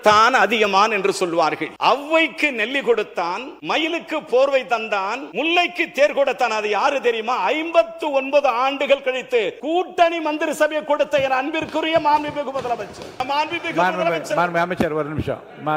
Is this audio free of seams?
no; 5 cuts; at 1.7 s, 3.5 s, 5.2 s, 9.6 s, 13.0 s

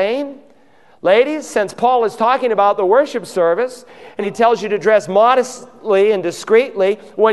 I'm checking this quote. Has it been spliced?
yes; 1 cut; at 4.2 s

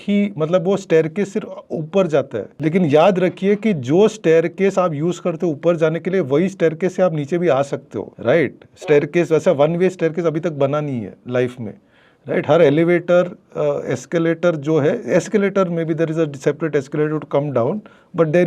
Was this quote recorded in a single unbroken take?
yes; 0 cuts

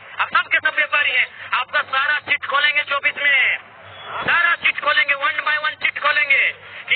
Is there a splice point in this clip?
no; 0 cuts

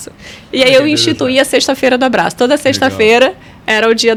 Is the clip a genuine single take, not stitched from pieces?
yes; 0 cuts

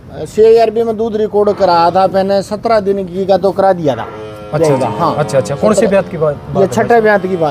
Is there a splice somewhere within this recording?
no; 0 cuts

